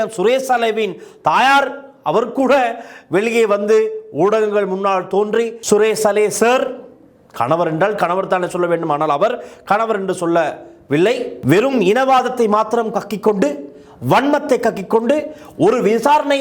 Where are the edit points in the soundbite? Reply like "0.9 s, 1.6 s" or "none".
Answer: 5.6 s, 11.3 s